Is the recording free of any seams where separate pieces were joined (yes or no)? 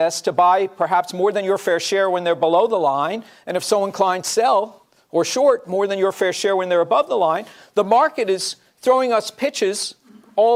yes